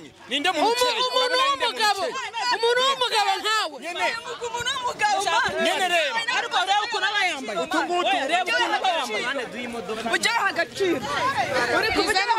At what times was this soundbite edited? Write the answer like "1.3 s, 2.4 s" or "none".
none

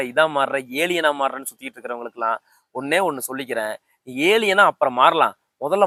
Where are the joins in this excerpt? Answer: none

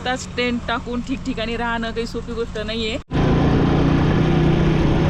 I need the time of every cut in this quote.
3.1 s

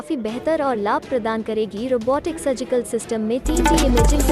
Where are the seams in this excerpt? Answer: none

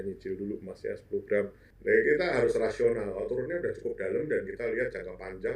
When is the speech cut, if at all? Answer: 1.6 s

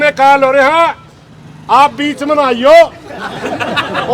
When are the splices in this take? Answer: none

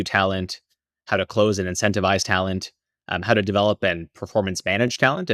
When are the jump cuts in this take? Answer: none

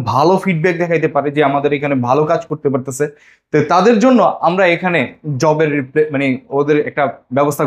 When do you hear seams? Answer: none

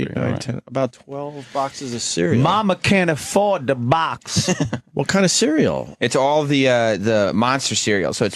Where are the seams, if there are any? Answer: 4.8 s

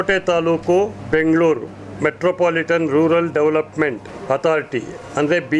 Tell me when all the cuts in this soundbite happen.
1.0 s, 4.1 s

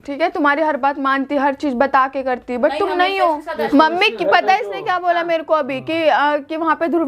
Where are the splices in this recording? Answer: 3.6 s

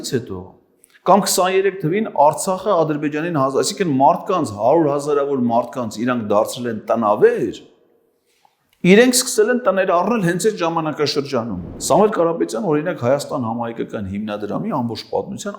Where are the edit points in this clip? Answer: 11.7 s

